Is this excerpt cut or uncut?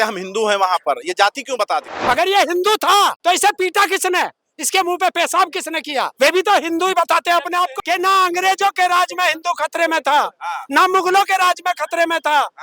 cut